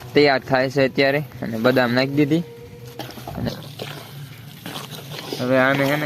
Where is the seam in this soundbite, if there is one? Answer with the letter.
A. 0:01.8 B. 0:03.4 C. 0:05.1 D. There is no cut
B